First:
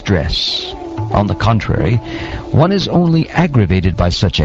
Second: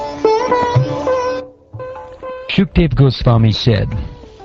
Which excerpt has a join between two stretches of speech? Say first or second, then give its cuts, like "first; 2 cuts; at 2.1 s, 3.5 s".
second; 1 cut; at 1.9 s